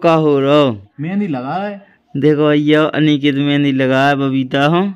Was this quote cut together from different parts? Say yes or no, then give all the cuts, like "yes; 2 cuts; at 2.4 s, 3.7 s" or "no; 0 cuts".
yes; 1 cut; at 0.9 s